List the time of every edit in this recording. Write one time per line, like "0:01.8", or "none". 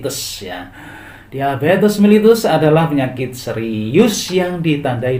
none